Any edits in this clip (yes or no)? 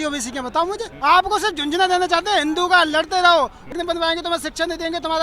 yes